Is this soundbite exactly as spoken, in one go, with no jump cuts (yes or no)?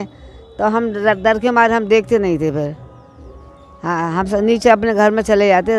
yes